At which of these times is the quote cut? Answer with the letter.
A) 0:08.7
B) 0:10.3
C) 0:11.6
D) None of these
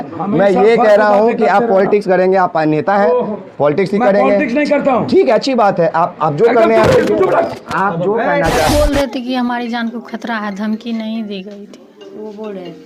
A